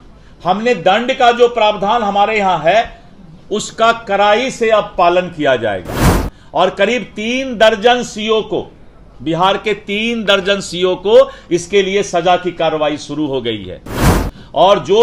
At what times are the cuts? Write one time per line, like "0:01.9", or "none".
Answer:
none

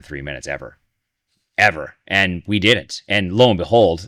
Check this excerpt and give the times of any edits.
none

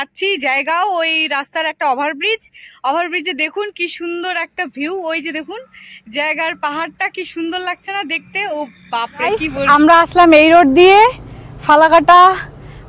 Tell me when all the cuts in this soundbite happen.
0:09.7

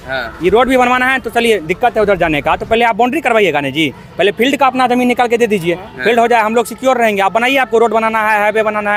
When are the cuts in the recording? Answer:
none

